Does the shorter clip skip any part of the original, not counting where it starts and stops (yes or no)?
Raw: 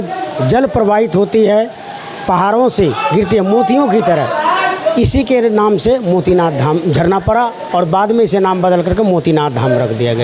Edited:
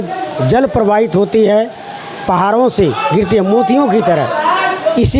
no